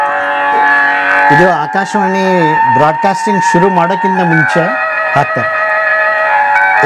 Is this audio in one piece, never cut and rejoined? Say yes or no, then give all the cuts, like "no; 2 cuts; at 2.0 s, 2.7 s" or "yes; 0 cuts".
yes; 0 cuts